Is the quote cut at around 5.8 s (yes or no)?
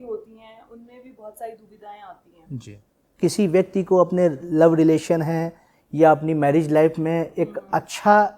no